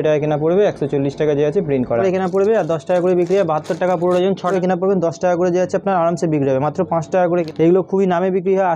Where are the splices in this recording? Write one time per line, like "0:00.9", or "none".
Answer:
0:02.0
0:04.5
0:07.5